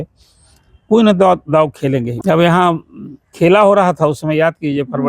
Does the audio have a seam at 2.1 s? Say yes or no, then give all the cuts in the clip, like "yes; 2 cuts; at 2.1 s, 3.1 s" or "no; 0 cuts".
yes; 1 cut; at 2.1 s